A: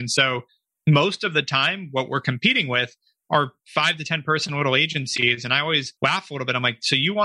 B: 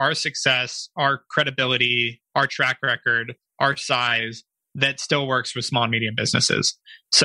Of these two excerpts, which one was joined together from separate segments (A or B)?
A